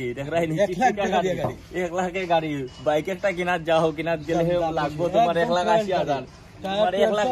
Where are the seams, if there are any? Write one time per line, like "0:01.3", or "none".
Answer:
none